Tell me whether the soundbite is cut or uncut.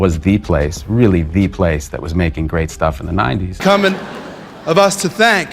cut